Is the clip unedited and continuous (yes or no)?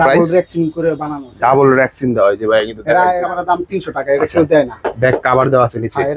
no